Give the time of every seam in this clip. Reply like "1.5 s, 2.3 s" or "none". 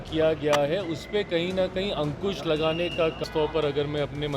3.2 s